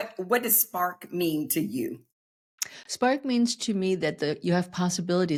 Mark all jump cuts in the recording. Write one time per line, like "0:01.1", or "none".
none